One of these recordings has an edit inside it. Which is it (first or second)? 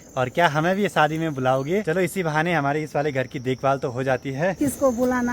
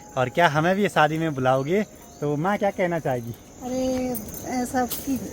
first